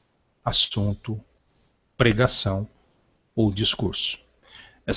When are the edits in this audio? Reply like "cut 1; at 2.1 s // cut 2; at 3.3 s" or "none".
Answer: cut 1; at 2.3 s